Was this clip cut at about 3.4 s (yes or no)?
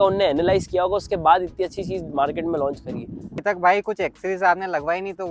yes